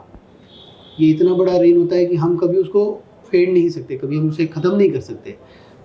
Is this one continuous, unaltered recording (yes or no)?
no